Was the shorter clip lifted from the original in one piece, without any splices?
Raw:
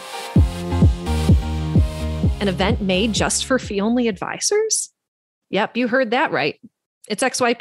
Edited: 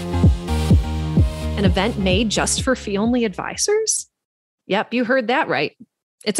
no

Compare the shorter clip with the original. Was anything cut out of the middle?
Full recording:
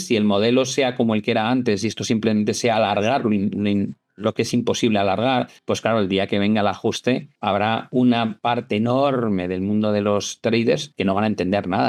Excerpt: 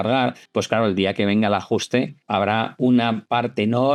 no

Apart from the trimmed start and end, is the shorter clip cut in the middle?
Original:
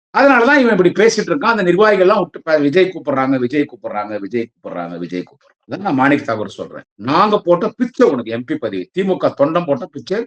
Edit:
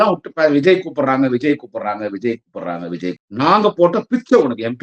yes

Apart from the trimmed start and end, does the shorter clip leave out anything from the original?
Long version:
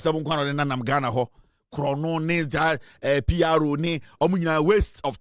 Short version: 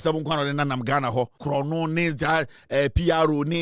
yes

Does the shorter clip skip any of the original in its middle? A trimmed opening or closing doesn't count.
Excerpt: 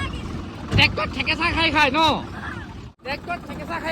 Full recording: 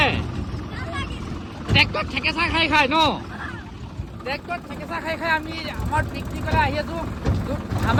yes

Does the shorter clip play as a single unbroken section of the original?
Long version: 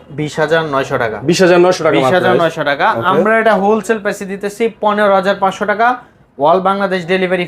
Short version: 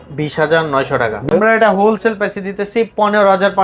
no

